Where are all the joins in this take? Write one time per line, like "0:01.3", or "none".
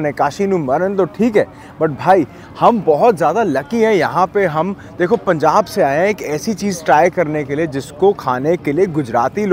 none